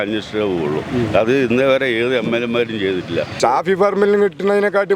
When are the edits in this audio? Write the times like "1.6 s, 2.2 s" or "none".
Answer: 3.3 s